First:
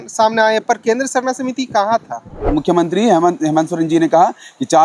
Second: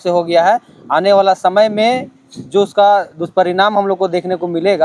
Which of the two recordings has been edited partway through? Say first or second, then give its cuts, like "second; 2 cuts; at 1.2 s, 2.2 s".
first; 1 cut; at 2.4 s